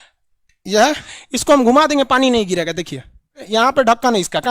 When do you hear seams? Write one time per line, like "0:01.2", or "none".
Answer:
0:01.1
0:03.4